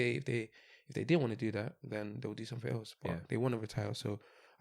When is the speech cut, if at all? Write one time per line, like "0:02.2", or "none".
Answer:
none